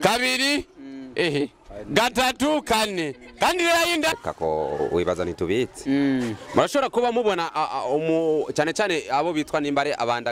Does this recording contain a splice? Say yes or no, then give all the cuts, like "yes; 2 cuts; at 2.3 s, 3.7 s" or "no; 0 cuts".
yes; 1 cut; at 4.1 s